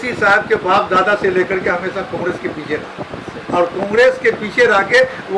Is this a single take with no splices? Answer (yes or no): yes